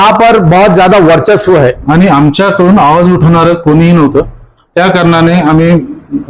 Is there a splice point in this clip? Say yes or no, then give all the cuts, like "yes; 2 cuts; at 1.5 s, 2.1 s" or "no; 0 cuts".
yes; 1 cut; at 1.8 s